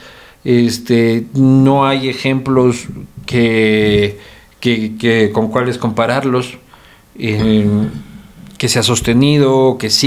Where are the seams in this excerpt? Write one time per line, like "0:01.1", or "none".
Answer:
none